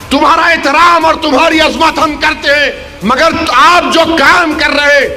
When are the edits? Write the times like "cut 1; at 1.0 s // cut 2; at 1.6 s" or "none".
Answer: none